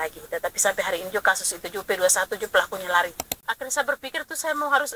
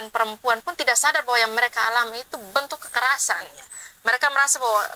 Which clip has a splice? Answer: first; 1 cut; at 3.3 s

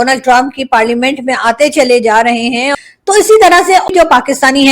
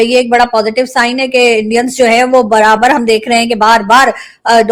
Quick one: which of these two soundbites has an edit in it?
first; 2 cuts; at 2.7 s, 3.9 s

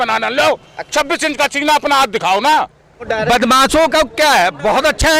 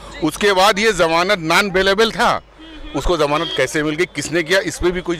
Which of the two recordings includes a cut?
first; 1 cut; at 3.1 s

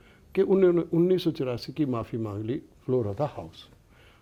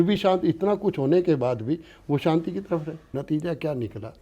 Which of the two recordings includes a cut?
second; 1 cut; at 3.0 s

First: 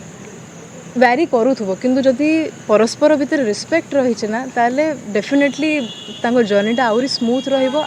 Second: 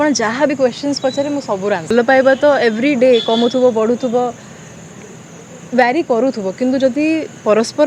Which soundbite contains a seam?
second; 1 cut; at 1.9 s

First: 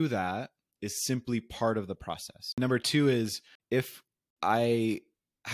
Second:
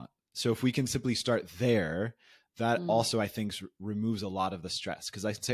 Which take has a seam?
first; 2 cuts; at 2.5 s, 3.9 s

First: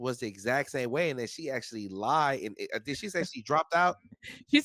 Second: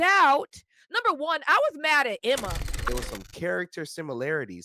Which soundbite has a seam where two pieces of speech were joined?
second; 1 cut; at 2.8 s

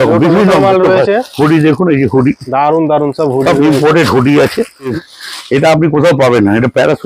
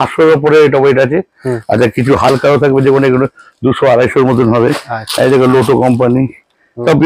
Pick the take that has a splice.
first; 2 cuts; at 1.3 s, 4.9 s

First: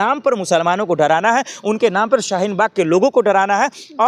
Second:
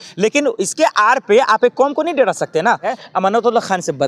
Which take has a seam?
second; 1 cut; at 3.0 s

